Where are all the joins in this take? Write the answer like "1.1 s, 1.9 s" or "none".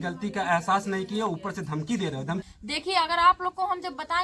2.4 s